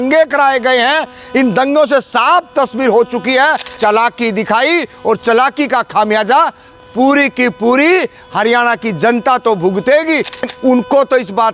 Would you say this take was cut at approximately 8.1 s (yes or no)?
no